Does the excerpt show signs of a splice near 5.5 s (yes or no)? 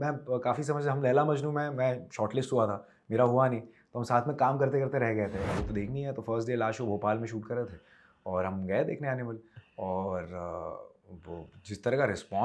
yes